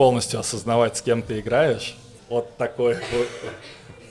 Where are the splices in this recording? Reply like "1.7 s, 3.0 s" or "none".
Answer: 2.1 s

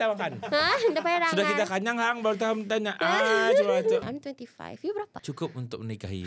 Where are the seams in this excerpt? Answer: 4.0 s, 5.2 s

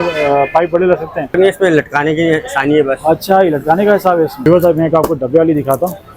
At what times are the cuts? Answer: 1.3 s, 4.5 s

